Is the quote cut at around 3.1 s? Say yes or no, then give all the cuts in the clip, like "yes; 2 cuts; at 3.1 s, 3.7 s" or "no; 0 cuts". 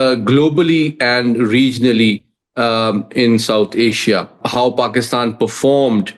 no; 1 cut; at 4.4 s